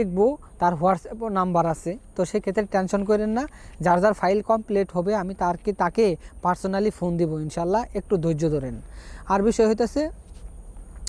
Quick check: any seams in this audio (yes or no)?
no